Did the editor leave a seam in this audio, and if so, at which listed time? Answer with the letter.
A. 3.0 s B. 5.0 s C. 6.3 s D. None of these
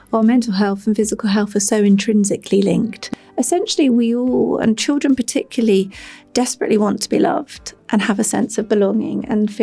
A